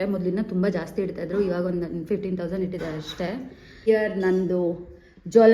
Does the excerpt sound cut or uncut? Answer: cut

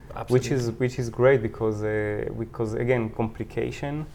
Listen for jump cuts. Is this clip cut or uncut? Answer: uncut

